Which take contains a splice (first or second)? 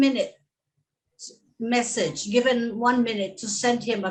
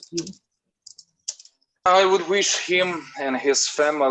second